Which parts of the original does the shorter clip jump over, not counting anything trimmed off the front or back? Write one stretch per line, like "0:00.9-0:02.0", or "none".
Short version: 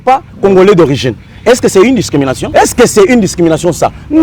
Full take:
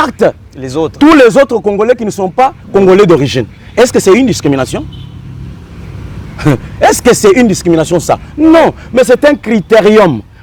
0:04.7-0:06.7